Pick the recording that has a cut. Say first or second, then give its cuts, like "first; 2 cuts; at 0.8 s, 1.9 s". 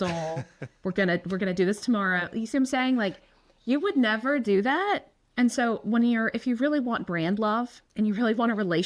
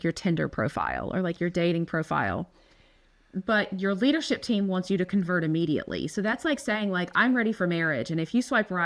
first; 2 cuts; at 5.2 s, 7.8 s